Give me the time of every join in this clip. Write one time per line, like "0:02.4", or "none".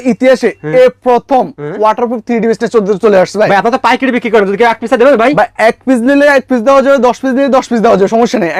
none